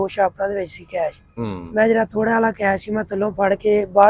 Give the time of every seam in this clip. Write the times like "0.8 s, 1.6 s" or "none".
none